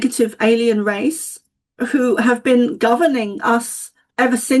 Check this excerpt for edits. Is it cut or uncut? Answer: uncut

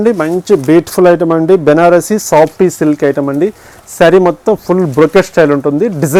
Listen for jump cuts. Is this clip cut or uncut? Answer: uncut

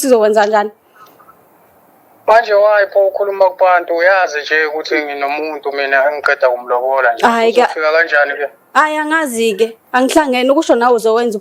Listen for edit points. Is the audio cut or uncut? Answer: uncut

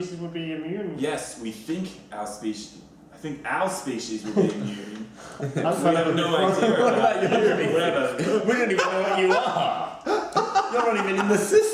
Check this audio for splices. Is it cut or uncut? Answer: uncut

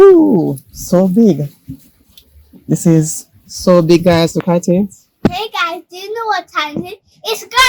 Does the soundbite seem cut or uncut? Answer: cut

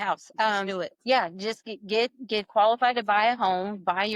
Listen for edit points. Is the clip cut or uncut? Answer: uncut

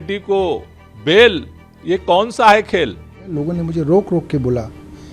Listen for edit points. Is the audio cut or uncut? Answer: cut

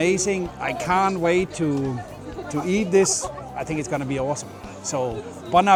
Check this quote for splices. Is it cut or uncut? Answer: uncut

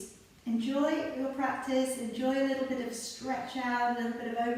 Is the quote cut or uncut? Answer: uncut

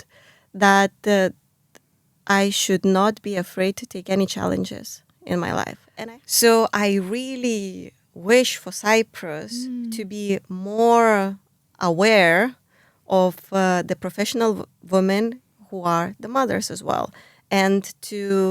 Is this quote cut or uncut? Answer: cut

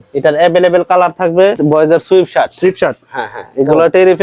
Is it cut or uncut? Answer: cut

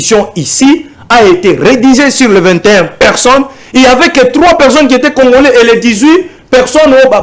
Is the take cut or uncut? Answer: uncut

